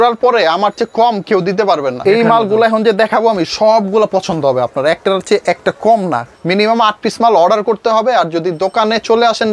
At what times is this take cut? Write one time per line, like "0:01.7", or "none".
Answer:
0:02.0
0:06.3